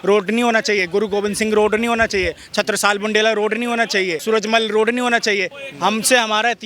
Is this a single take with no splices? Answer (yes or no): no